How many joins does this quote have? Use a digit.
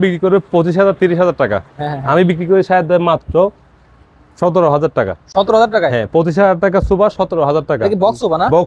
0